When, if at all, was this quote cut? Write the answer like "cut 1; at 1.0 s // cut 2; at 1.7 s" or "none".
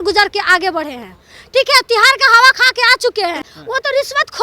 cut 1; at 3.5 s